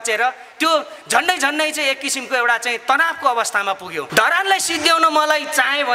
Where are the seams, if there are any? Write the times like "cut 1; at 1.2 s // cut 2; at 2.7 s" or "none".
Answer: cut 1; at 4.1 s